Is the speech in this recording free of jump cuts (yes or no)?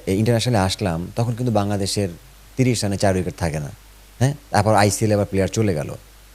yes